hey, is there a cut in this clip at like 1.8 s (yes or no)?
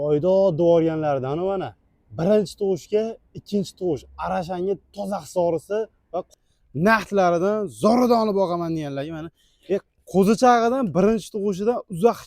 no